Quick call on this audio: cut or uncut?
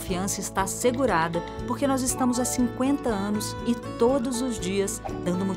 uncut